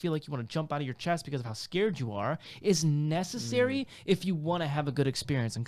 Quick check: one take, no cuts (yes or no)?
yes